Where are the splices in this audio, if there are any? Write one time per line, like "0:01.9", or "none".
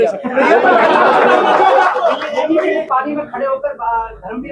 0:02.8